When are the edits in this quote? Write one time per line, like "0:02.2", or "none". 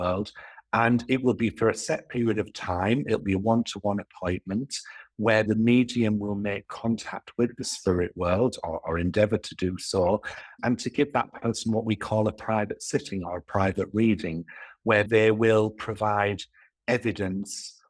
0:05.5
0:10.6
0:15.1